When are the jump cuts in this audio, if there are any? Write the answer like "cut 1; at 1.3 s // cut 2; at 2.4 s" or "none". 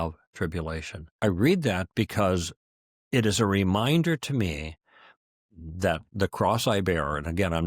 cut 1; at 1.0 s